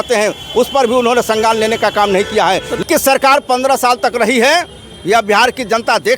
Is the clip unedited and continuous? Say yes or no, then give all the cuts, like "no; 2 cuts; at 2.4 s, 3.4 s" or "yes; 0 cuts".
no; 1 cut; at 2.8 s